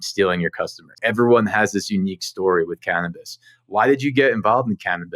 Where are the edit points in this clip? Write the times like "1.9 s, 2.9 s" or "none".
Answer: 1.0 s